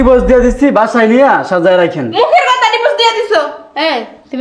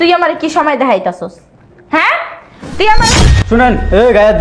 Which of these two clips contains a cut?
second; 1 cut; at 3.2 s

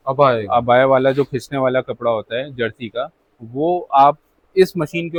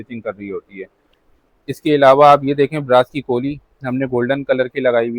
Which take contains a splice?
second; 1 cut; at 1.0 s

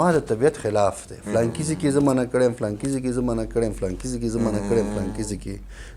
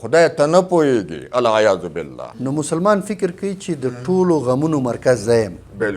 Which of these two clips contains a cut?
second; 1 cut; at 2.3 s

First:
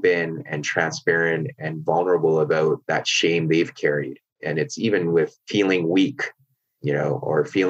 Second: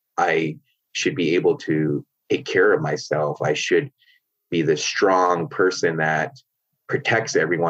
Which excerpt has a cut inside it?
first; 3 cuts; at 2.8 s, 4.3 s, 5.4 s

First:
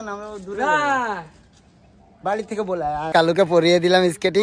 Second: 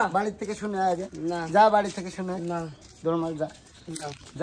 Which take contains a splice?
first; 1 cut; at 3.0 s

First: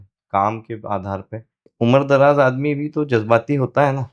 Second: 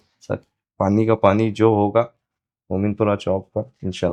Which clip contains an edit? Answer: first; 1 cut; at 1.6 s

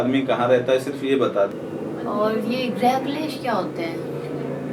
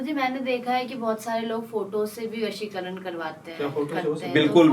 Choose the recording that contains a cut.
first; 1 cut; at 1.5 s

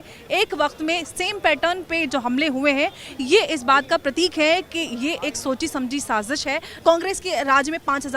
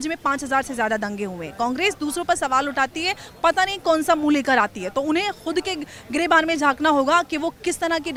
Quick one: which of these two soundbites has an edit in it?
first; 1 cut; at 6.7 s

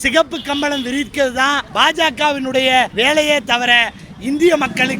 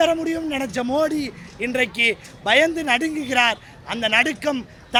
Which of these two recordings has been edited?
first; 2 cuts; at 1.7 s, 2.9 s

